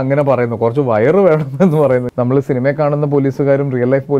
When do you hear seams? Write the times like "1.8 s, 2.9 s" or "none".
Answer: 2.1 s